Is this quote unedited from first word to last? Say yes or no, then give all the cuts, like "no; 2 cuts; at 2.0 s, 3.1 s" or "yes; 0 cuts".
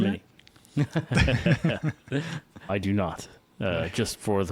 yes; 0 cuts